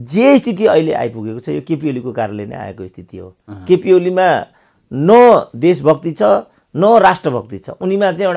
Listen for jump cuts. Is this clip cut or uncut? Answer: uncut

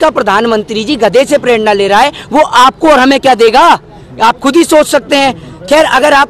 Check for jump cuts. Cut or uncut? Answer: uncut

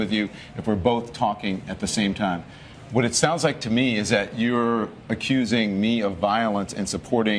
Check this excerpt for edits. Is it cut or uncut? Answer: uncut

